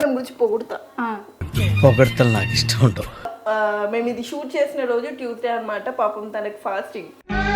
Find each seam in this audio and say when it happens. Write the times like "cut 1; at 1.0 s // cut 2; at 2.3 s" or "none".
cut 1; at 3.4 s